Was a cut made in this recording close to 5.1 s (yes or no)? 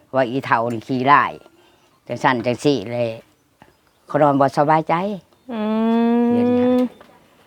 no